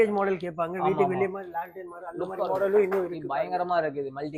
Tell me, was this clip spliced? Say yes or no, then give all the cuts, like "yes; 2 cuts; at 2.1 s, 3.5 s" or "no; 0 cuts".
no; 0 cuts